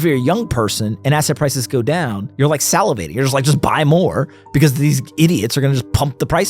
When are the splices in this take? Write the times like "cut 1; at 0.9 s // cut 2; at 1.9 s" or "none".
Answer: cut 1; at 2.2 s